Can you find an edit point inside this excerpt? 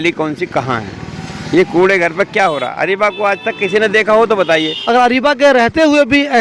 yes; 1 cut; at 4.7 s

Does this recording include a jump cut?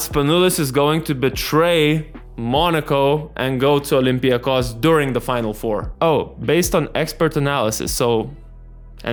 no; 0 cuts

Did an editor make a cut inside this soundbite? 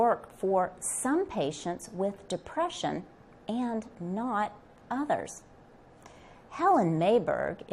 yes; 1 cut; at 6.7 s

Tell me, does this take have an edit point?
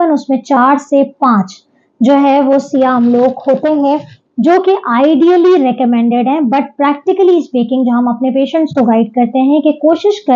no; 0 cuts

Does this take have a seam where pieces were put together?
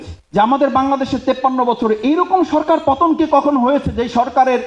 no; 0 cuts

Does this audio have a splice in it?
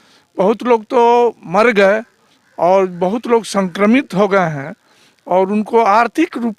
no; 0 cuts

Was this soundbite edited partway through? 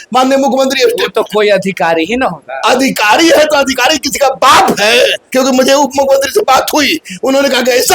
yes; 1 cut; at 5.2 s

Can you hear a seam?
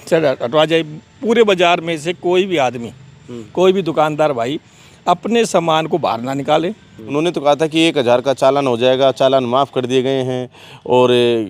yes; 1 cut; at 7.0 s

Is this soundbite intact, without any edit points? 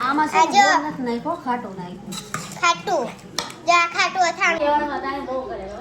no; 1 cut; at 4.6 s

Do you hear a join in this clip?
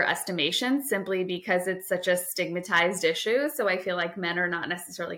no; 0 cuts

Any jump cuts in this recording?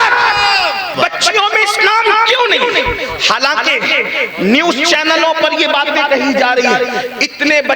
yes; 1 cut; at 0.9 s

